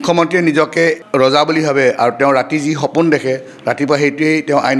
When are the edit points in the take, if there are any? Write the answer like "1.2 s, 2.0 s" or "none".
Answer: 1.0 s